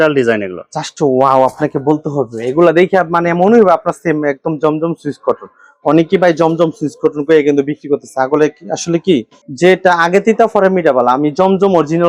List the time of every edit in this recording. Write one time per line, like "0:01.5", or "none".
none